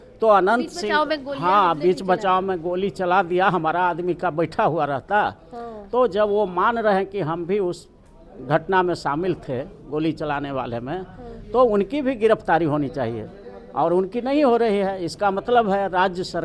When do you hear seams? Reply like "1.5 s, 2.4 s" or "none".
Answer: none